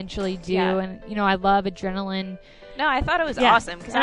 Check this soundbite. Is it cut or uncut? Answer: cut